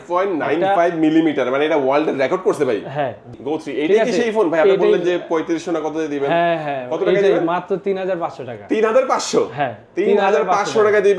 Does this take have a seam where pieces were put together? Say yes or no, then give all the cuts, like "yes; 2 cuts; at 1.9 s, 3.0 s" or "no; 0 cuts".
yes; 1 cut; at 3.4 s